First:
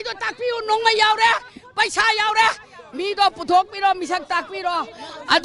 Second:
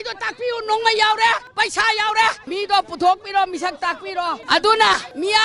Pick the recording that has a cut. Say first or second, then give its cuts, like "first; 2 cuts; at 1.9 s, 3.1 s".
second; 3 cuts; at 1.5 s, 2.4 s, 4.4 s